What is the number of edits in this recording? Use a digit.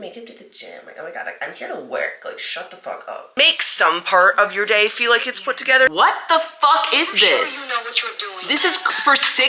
2